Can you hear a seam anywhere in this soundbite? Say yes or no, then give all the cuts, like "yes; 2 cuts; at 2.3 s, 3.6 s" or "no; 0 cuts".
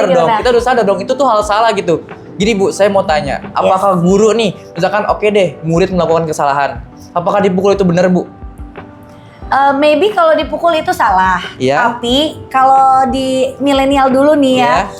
no; 0 cuts